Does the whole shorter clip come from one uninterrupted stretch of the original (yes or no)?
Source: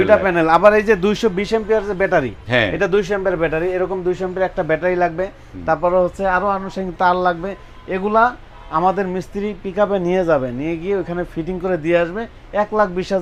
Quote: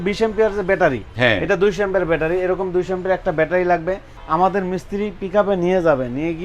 no